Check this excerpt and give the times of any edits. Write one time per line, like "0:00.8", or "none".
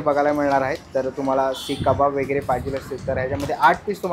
none